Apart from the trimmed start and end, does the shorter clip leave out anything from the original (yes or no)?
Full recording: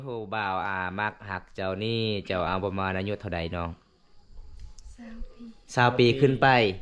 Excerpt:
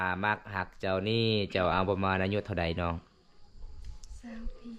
no